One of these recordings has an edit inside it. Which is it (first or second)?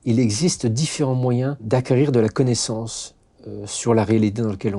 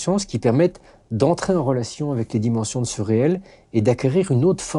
first